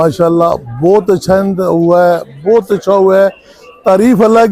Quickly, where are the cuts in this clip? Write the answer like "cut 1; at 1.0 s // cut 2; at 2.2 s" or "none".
none